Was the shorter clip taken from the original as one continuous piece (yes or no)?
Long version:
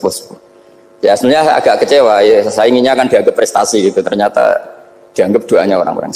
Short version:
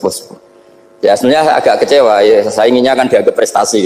yes